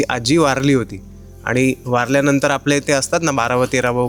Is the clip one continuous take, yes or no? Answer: yes